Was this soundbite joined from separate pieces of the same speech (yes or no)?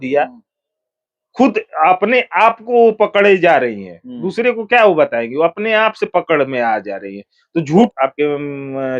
yes